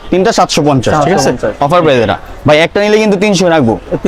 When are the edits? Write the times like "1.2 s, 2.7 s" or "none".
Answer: none

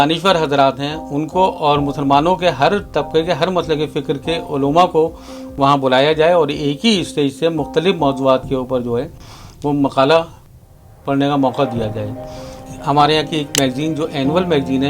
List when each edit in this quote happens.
12.7 s

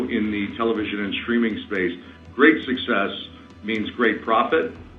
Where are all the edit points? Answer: none

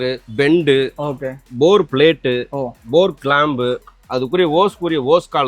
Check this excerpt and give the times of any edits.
none

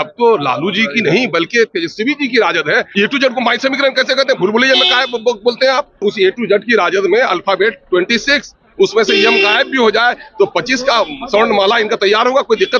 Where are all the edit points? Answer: 2.9 s, 6.0 s

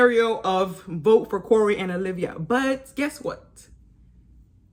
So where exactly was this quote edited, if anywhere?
none

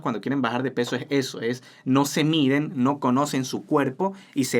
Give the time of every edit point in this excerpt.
none

